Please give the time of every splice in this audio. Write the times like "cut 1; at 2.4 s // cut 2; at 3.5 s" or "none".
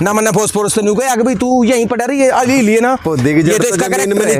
none